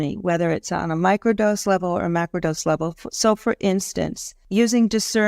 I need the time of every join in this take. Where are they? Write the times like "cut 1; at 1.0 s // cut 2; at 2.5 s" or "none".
cut 1; at 4.3 s